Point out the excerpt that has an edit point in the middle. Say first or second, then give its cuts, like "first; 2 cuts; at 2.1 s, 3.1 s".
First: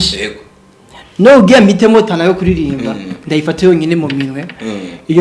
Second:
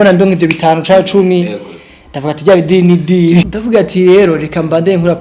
second; 1 cut; at 3.4 s